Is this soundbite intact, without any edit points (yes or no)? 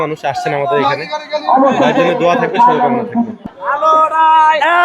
no